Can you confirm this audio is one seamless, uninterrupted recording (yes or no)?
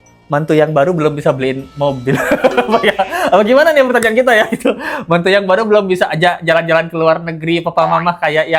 yes